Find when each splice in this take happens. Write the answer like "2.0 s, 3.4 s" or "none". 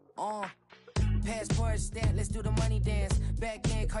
none